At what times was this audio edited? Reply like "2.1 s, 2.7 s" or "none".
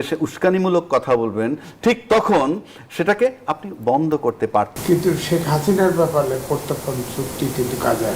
4.8 s